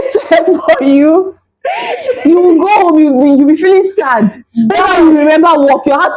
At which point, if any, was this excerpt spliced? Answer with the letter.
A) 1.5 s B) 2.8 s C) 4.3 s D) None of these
D